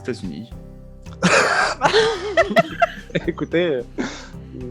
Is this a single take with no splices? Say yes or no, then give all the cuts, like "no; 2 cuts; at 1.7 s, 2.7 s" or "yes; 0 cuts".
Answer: yes; 0 cuts